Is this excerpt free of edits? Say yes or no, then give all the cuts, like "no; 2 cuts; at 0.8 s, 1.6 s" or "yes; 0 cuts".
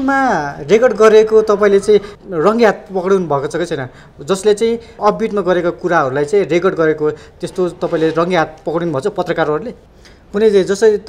no; 1 cut; at 9.7 s